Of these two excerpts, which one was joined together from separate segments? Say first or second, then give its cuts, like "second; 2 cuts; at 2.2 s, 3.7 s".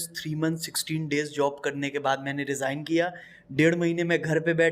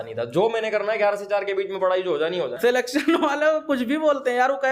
second; 1 cut; at 2.5 s